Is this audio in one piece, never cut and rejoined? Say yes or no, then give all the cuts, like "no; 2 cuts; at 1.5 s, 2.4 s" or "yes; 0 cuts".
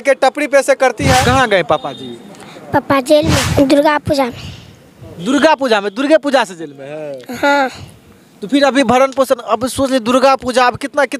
no; 2 cuts; at 1.2 s, 3.4 s